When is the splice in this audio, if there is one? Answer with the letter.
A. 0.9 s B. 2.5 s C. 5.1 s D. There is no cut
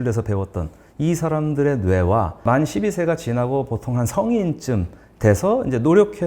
B